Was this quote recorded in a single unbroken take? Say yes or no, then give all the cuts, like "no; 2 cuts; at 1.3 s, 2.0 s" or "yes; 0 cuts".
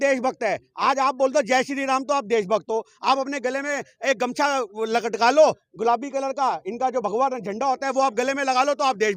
yes; 0 cuts